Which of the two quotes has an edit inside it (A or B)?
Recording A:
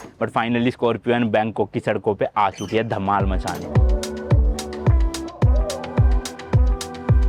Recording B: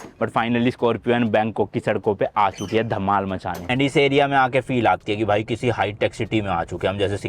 B